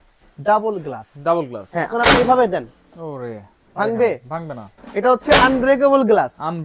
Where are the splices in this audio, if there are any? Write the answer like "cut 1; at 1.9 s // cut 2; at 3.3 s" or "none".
cut 1; at 1.9 s